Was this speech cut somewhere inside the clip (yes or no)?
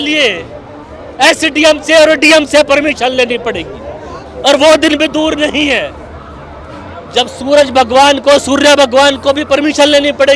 no